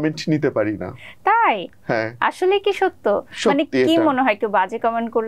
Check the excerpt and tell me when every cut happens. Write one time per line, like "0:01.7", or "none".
none